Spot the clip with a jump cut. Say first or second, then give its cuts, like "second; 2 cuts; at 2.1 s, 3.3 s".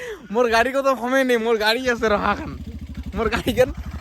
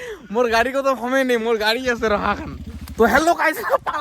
second; 1 cut; at 2.8 s